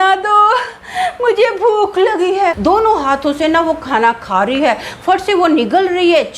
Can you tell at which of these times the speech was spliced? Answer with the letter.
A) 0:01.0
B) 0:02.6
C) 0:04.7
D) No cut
B